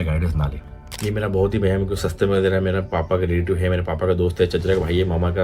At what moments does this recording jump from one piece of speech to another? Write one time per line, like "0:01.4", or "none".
0:00.9